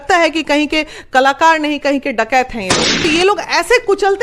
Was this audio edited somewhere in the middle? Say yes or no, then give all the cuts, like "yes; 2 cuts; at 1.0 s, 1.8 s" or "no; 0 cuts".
yes; 1 cut; at 3.1 s